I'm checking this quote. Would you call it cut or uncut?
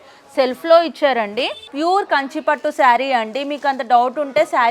cut